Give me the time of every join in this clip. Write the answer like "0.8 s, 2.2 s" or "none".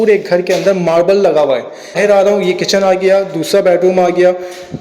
2.0 s